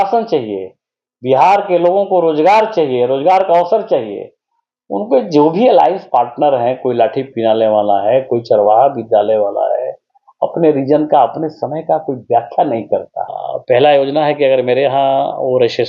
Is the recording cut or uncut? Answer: cut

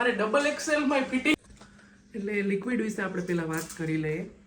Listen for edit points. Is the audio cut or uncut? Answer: cut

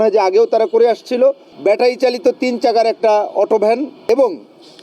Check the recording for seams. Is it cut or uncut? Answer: cut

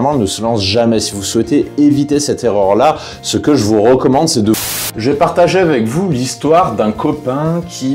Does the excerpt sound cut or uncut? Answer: cut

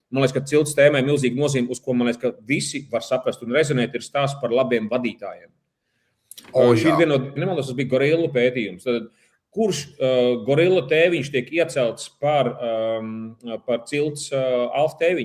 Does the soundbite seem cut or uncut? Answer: cut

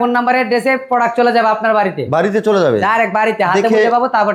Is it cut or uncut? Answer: uncut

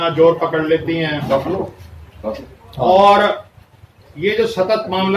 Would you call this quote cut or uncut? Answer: uncut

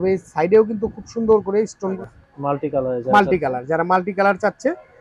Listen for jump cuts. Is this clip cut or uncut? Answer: cut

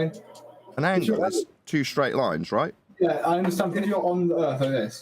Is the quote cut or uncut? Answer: cut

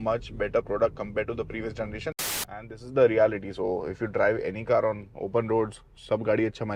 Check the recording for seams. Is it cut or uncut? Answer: cut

